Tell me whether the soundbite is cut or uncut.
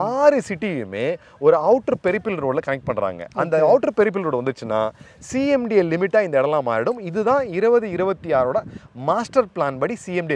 uncut